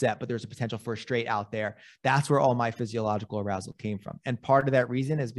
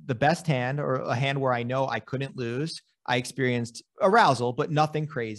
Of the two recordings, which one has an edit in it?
second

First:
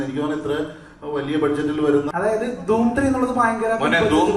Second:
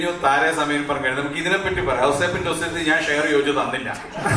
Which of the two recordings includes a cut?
first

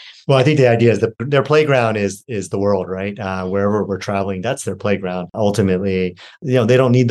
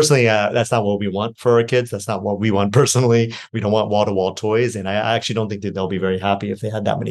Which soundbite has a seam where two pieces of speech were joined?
first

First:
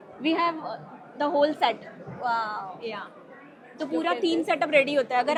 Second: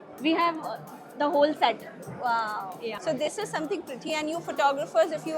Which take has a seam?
second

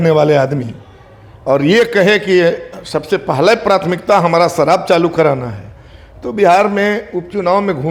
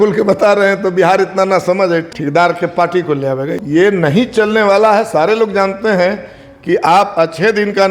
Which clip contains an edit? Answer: second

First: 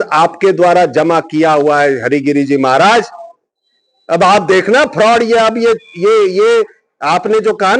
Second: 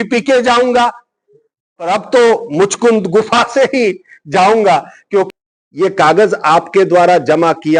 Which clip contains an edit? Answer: second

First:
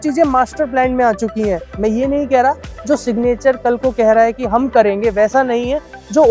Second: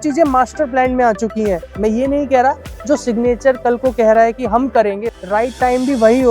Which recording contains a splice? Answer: second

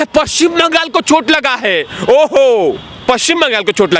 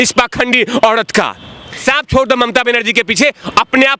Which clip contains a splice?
second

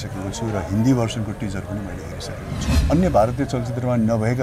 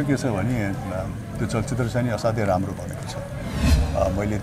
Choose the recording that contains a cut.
first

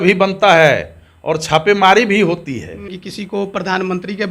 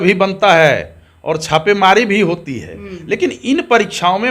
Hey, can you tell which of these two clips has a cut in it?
first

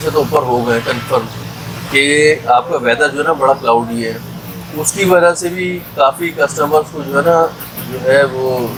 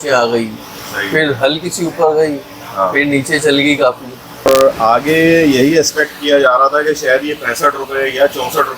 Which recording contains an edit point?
second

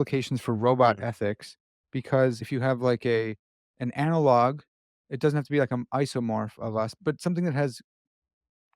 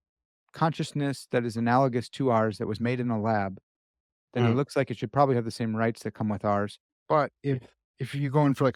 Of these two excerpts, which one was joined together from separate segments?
first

